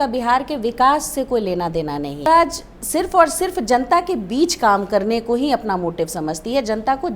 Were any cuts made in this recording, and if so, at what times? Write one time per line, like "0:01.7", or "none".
0:02.2